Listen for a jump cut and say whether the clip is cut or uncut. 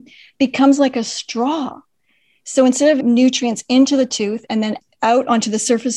cut